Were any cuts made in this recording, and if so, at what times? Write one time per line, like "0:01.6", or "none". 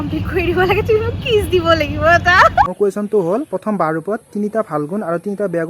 0:02.7